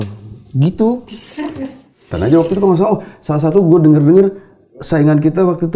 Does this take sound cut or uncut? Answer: cut